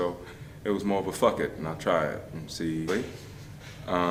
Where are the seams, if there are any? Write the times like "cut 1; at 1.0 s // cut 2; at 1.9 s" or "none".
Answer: none